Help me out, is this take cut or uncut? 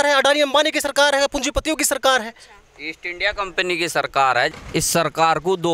cut